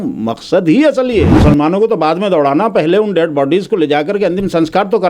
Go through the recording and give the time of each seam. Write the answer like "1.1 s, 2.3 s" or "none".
1.3 s